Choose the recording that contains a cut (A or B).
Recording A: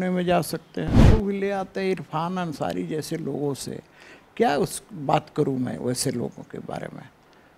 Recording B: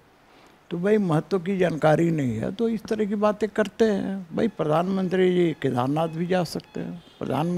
A